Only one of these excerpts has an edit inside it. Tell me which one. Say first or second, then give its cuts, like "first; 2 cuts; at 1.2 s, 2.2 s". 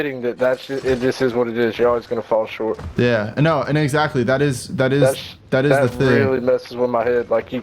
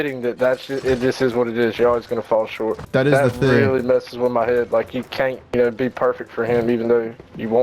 second; 1 cut; at 2.8 s